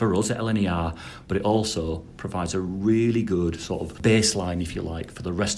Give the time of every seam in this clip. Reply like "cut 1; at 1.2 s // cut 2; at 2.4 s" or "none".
cut 1; at 3.9 s